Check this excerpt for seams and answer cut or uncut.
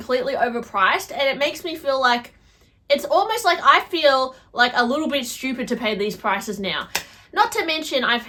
uncut